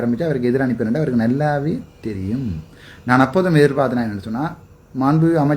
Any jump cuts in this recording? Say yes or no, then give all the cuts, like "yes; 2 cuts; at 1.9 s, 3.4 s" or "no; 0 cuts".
no; 0 cuts